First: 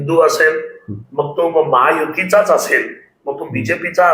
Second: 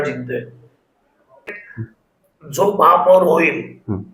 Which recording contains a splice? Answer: second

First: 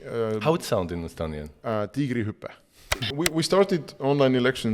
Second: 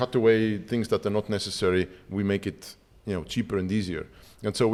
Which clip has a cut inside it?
first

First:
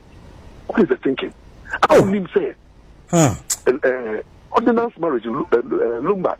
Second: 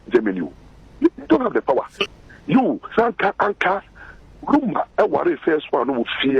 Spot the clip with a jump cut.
second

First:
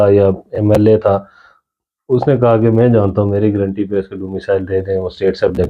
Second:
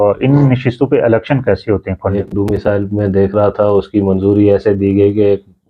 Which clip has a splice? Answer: second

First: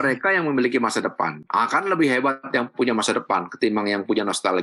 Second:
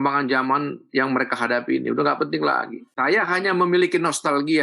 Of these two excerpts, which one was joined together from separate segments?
second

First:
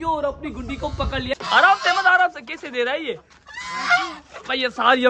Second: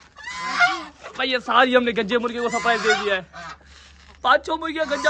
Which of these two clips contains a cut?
first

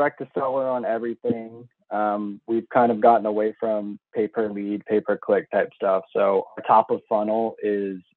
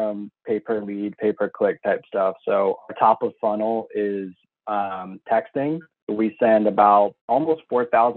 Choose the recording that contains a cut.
second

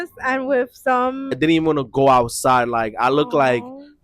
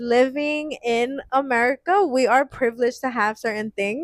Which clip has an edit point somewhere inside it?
first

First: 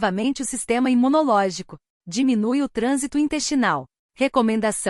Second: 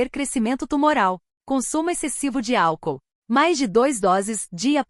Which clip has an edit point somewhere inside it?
second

